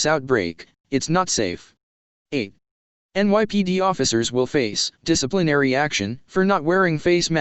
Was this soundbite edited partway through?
yes; 1 cut; at 2.5 s

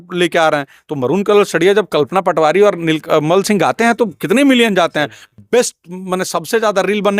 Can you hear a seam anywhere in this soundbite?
no; 0 cuts

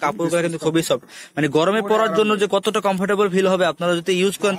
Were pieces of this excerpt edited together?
no; 0 cuts

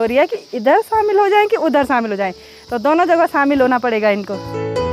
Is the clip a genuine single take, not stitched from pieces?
yes; 0 cuts

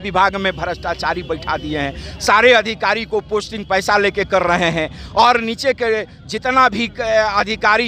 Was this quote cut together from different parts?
no; 0 cuts

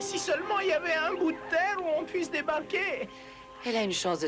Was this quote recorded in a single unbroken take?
no; 1 cut; at 1.2 s

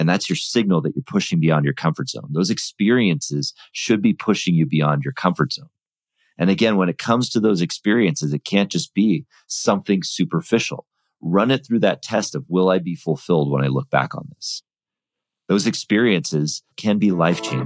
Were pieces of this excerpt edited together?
yes; 1 cut; at 16.7 s

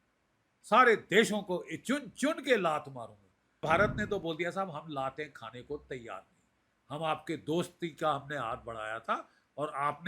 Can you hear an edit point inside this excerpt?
yes; 1 cut; at 3.6 s

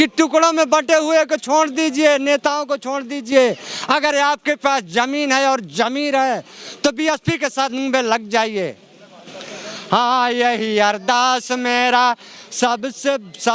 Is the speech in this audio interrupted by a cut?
no; 0 cuts

